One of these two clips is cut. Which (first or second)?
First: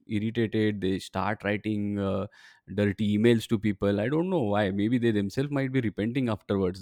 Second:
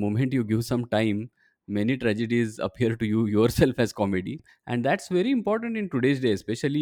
second